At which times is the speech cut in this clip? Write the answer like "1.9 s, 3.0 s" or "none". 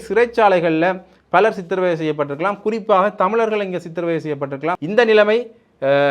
4.8 s